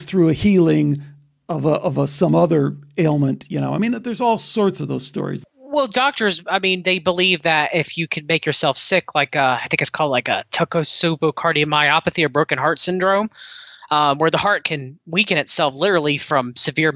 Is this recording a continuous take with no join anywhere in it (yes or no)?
no